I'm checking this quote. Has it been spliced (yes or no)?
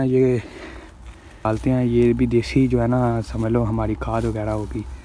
yes